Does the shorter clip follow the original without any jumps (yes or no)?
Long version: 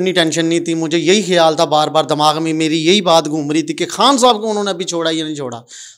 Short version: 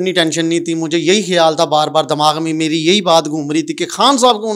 yes